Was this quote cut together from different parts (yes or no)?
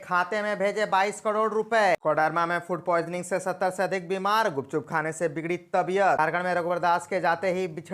yes